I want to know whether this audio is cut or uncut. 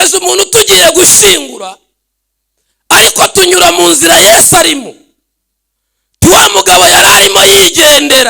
uncut